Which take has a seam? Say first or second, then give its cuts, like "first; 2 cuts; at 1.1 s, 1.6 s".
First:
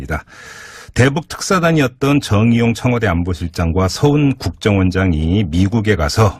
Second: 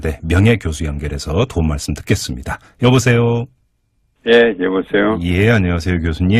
second; 1 cut; at 5.2 s